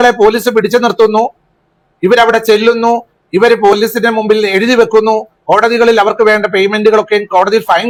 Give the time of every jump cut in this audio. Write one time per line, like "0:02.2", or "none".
none